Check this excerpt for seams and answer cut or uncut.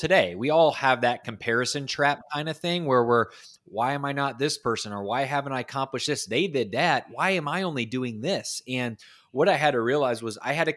uncut